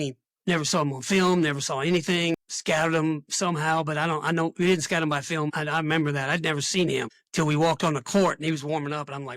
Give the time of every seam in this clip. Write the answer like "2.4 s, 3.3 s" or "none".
2.4 s, 5.6 s, 7.2 s

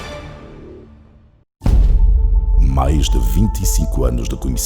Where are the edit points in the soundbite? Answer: 1.4 s

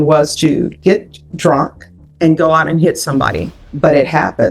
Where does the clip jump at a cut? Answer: 3.6 s

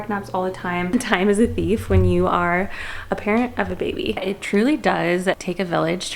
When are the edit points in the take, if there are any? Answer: 0.9 s, 4.2 s

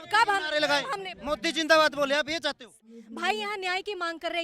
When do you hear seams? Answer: 2.7 s

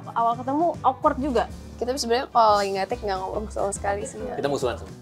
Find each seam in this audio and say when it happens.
0.8 s, 1.6 s

